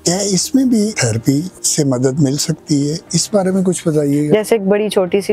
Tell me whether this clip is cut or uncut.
cut